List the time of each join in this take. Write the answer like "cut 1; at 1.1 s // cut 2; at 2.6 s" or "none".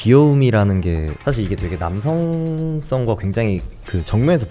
cut 1; at 1.1 s